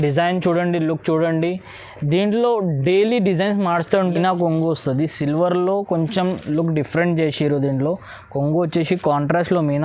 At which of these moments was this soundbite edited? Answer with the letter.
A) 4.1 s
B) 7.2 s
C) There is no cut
A